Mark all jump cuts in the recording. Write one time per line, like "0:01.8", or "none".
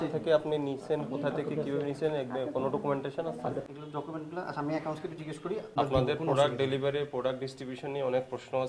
0:03.6
0:05.7